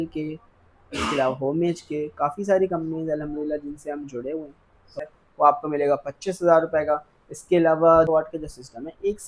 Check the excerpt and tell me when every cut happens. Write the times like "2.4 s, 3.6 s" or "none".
5.0 s, 8.1 s